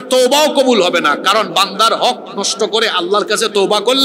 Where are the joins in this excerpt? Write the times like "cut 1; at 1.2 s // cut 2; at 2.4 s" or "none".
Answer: none